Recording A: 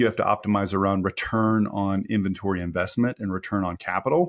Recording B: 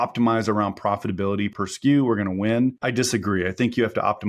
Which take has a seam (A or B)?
B